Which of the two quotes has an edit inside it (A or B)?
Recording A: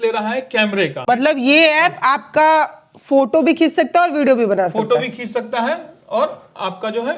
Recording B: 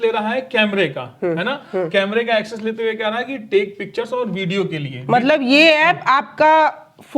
A